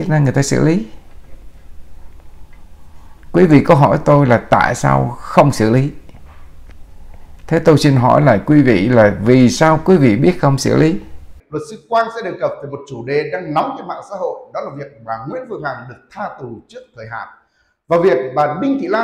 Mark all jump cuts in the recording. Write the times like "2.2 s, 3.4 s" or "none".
11.3 s